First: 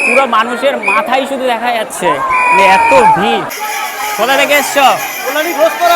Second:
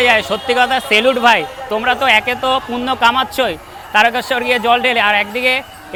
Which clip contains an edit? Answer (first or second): first